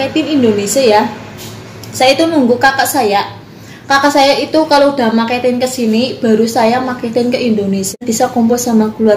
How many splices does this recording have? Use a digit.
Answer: 1